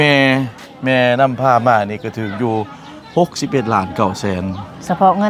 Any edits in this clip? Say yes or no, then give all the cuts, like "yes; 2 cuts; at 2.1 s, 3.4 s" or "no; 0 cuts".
no; 0 cuts